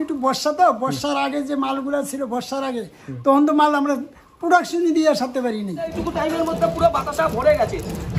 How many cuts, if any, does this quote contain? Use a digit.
1